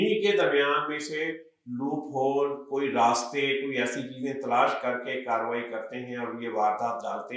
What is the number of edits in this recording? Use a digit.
0